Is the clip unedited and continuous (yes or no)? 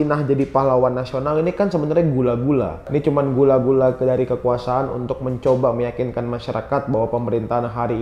no